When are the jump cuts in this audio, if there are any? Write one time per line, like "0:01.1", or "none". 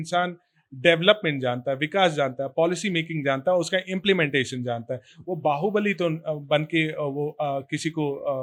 none